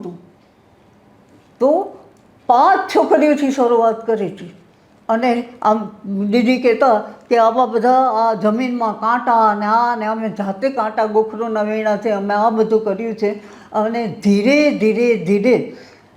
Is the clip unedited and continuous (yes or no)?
yes